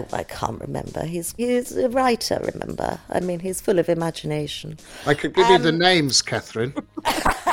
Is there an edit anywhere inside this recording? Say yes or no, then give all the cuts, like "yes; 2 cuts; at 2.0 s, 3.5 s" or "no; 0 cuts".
yes; 1 cut; at 1.4 s